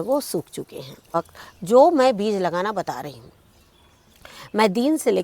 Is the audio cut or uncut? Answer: cut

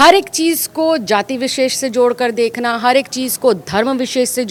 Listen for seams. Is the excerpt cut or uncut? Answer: uncut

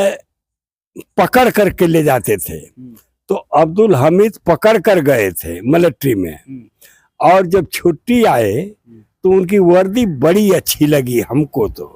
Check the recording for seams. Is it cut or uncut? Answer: uncut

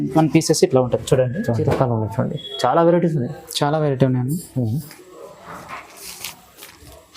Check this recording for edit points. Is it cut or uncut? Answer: cut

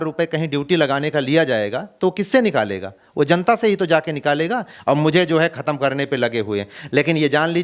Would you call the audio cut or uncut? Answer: cut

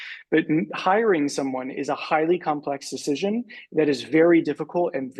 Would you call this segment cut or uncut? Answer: uncut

